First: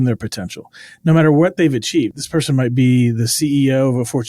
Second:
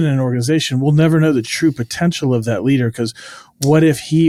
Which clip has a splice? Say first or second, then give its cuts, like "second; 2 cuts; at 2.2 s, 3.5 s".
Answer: first; 1 cut; at 2.1 s